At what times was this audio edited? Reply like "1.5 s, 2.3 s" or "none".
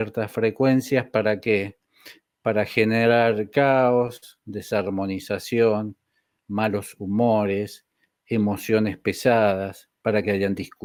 none